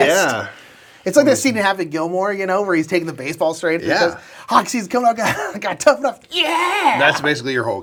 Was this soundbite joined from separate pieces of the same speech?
no; 0 cuts

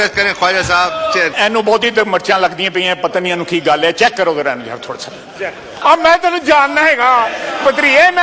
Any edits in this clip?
yes; 2 cuts; at 1.4 s, 5.7 s

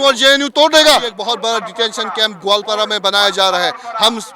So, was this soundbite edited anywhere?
yes; 1 cut; at 1.1 s

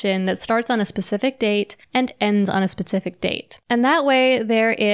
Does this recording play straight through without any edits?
no; 2 cuts; at 1.8 s, 3.5 s

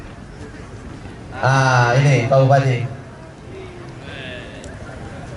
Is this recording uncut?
yes; 0 cuts

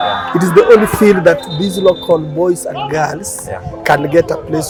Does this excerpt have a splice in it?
no; 0 cuts

